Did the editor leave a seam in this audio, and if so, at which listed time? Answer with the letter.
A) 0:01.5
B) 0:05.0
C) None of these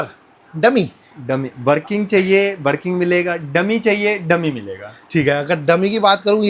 C